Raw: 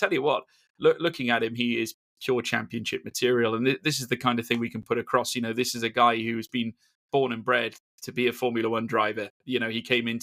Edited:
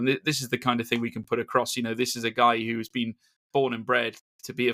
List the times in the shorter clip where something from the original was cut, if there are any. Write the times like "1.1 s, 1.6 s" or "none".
none